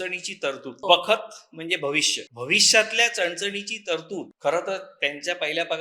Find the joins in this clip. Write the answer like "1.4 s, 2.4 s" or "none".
0.8 s, 2.2 s, 4.3 s